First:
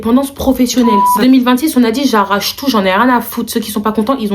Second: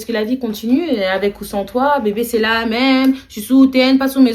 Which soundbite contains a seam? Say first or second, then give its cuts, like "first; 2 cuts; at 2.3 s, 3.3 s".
first; 1 cut; at 1.1 s